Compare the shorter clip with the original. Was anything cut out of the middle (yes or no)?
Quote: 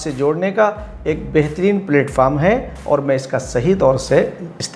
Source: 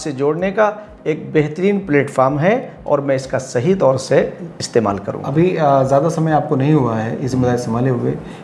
no